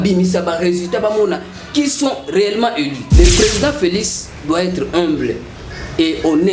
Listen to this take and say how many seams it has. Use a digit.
1